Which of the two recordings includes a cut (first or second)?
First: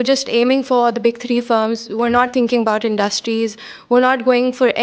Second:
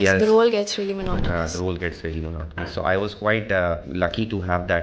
second